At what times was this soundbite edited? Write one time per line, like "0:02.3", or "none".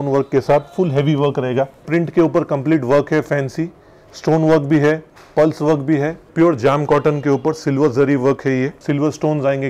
0:01.8
0:06.3
0:08.8